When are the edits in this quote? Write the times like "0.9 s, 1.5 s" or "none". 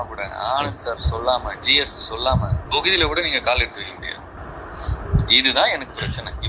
none